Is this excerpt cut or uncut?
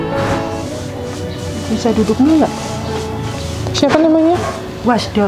uncut